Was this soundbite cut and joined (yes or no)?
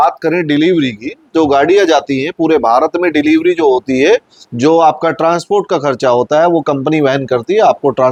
no